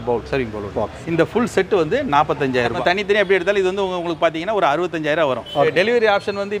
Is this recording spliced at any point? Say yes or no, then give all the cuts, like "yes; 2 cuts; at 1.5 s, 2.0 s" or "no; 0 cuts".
yes; 2 cuts; at 2.8 s, 5.7 s